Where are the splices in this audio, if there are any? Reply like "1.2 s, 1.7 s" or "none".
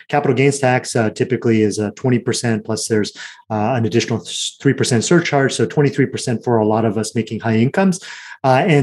none